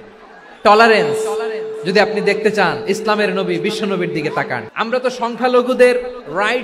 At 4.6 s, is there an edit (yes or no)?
yes